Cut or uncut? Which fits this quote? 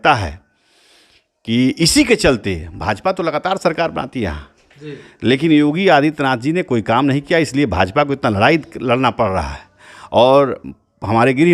uncut